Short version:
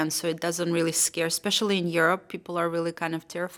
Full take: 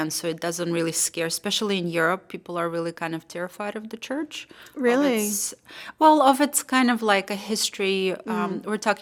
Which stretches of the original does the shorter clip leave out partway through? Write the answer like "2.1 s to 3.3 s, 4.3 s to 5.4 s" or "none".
none

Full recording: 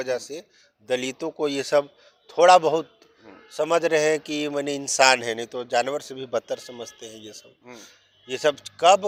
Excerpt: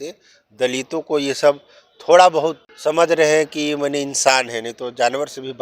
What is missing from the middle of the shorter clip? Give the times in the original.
3.0 s to 3.4 s

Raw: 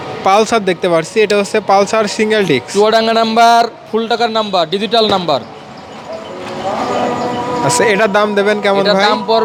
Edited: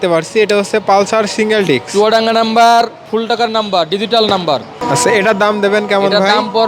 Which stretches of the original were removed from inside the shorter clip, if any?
5.6 s to 7.5 s

